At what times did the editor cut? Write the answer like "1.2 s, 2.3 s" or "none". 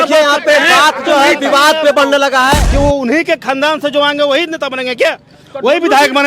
2.6 s